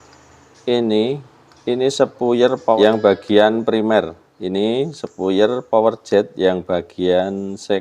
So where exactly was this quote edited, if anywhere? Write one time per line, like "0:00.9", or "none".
0:02.8